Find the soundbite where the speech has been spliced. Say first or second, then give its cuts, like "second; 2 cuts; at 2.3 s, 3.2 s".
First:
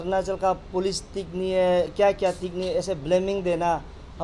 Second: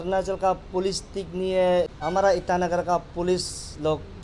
second; 1 cut; at 1.9 s